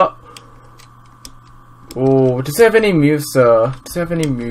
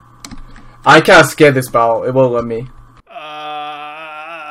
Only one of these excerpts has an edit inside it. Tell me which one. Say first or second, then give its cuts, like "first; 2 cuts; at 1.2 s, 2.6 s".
second; 1 cut; at 3.1 s